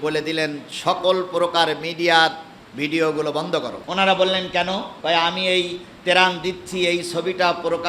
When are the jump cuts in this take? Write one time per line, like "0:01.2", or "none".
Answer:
0:03.8
0:04.9